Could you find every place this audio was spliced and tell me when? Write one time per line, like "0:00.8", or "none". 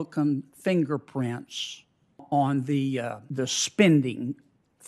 0:02.2